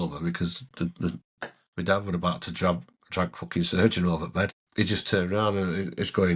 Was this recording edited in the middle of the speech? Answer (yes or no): yes